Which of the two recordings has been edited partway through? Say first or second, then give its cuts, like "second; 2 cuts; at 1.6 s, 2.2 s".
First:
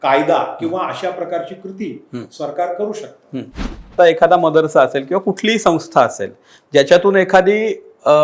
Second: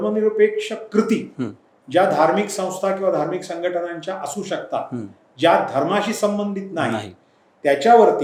first; 1 cut; at 3.9 s